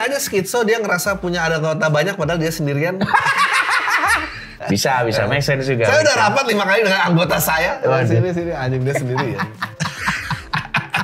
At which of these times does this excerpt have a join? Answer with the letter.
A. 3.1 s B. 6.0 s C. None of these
C